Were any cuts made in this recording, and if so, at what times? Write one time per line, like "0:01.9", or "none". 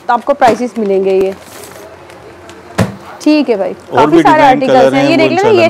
none